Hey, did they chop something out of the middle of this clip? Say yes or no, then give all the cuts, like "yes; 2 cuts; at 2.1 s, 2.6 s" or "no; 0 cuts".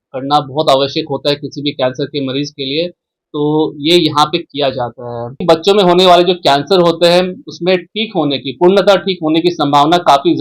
yes; 1 cut; at 5.4 s